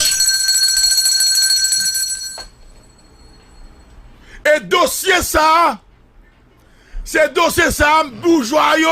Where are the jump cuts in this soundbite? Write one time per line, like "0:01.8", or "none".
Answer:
0:02.7